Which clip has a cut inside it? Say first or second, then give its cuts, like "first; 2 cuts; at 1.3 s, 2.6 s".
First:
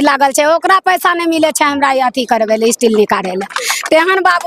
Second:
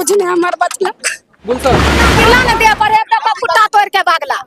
second; 1 cut; at 2.0 s